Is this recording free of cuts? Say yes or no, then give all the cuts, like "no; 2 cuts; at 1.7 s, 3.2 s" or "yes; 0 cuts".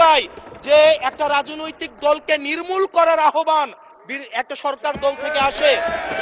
yes; 0 cuts